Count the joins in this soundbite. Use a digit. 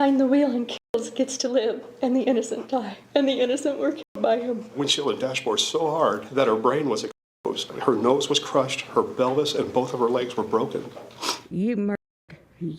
5